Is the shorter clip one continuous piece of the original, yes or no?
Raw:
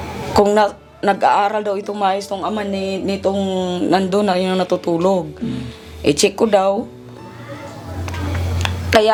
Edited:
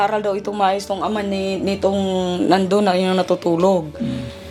yes